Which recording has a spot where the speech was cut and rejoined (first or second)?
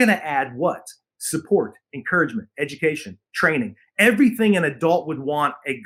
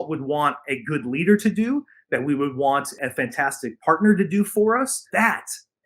second